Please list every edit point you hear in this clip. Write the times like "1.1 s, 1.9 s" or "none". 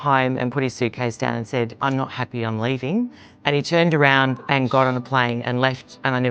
none